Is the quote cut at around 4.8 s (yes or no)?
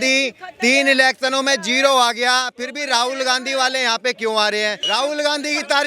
yes